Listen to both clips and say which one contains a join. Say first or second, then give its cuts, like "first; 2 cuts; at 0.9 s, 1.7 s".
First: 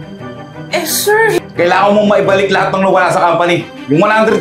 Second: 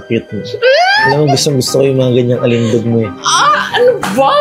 first; 1 cut; at 1.4 s